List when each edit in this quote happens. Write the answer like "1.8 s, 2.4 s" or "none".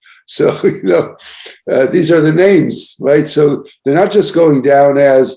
none